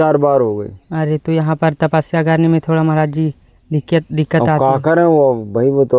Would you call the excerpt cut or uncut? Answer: uncut